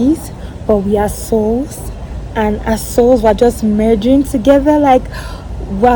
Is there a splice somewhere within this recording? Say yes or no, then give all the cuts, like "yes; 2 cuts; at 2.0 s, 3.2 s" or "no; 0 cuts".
no; 0 cuts